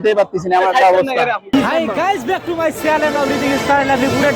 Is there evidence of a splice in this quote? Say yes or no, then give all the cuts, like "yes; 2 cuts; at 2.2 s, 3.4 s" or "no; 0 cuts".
yes; 1 cut; at 1.5 s